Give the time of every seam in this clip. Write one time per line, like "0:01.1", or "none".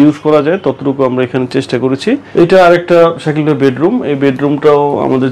0:02.3